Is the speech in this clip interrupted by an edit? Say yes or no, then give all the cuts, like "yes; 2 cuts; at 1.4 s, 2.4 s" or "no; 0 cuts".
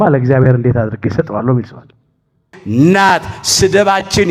yes; 1 cut; at 2.5 s